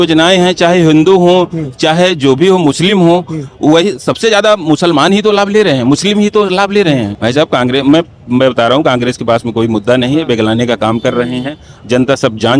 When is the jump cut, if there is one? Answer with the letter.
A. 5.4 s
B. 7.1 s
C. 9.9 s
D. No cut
B